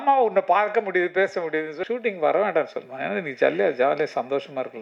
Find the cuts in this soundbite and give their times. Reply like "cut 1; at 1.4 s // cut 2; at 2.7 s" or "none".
cut 1; at 1.8 s